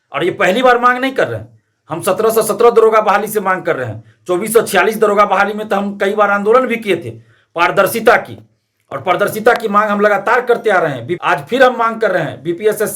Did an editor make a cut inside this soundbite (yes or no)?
yes